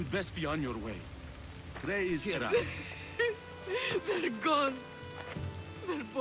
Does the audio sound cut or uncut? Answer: uncut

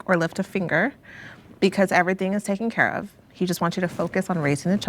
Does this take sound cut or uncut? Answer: uncut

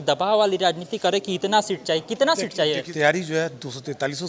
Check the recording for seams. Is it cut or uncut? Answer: cut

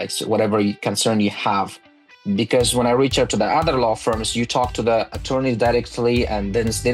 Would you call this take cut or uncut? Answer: uncut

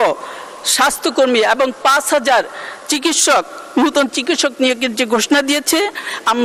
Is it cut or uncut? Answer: uncut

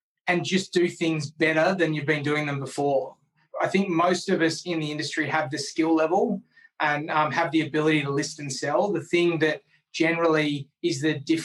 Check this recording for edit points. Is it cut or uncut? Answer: cut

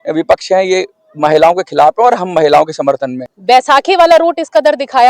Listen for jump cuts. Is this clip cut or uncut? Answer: cut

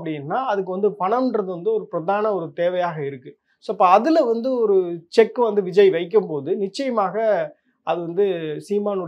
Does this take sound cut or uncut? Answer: uncut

